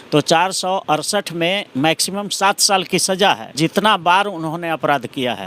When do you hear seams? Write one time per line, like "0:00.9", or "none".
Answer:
0:03.6